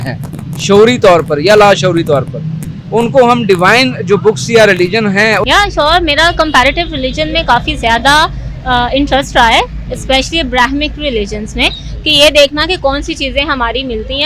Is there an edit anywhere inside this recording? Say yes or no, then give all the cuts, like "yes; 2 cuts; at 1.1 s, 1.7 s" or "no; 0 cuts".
yes; 1 cut; at 5.4 s